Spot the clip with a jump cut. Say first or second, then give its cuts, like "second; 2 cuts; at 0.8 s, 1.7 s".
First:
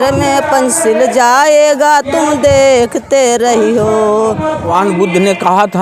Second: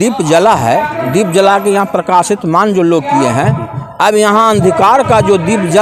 first; 1 cut; at 4.6 s